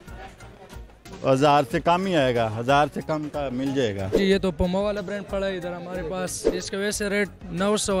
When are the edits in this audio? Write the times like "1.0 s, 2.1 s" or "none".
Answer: 4.2 s, 6.4 s